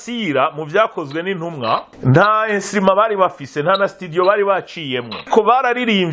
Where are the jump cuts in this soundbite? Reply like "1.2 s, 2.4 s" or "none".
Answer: 1.9 s, 5.2 s